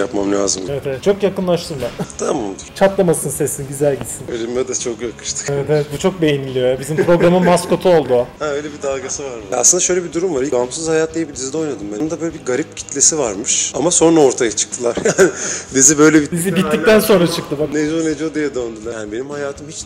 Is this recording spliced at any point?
yes; 5 cuts; at 1.0 s, 9.4 s, 10.5 s, 12.0 s, 18.9 s

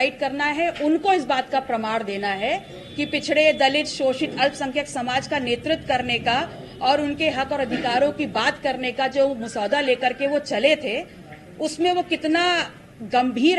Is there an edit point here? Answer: no; 0 cuts

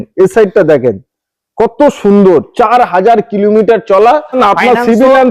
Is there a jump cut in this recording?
yes; 1 cut; at 4.4 s

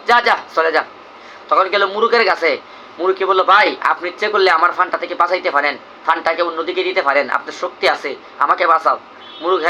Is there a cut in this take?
no; 0 cuts

